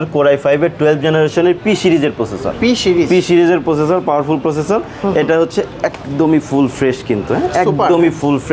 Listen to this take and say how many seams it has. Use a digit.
0